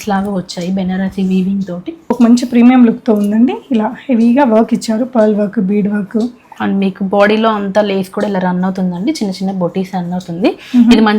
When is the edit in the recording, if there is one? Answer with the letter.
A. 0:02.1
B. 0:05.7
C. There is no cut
A